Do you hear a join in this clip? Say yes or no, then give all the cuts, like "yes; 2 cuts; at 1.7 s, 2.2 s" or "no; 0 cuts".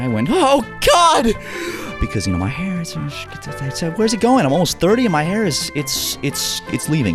no; 0 cuts